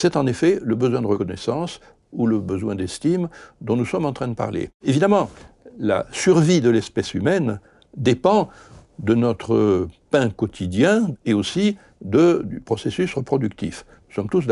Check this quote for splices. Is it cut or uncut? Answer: cut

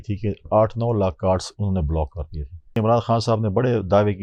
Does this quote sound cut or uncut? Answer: cut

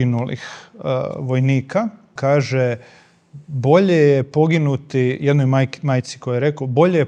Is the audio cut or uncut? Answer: cut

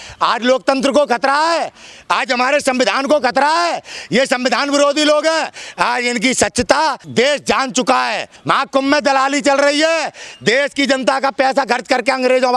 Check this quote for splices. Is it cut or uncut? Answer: cut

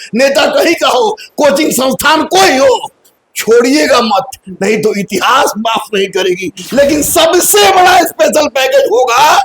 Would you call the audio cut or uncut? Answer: cut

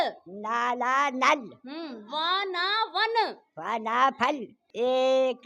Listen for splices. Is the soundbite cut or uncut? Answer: cut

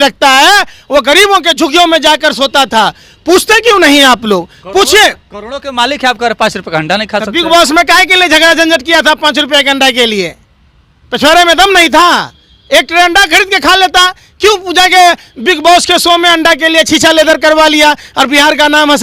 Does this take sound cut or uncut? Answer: uncut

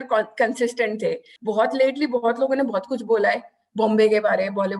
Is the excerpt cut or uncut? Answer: cut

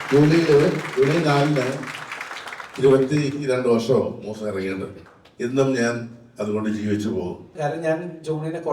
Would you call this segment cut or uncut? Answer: cut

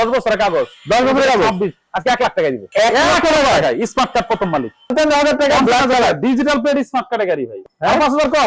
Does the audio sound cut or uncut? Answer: cut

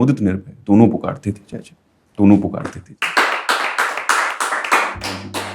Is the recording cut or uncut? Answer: uncut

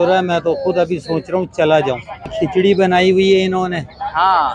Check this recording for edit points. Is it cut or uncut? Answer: cut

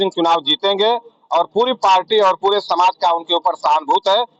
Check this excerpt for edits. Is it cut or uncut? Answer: uncut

